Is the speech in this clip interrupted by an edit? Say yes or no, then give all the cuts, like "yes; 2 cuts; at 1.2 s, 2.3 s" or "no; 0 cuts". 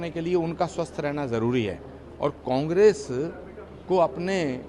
no; 0 cuts